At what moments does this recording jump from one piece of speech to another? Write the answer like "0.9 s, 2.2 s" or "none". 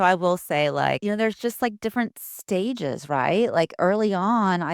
1.0 s